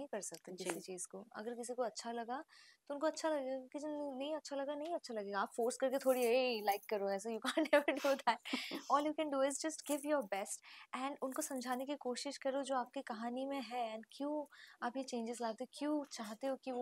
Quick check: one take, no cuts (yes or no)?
yes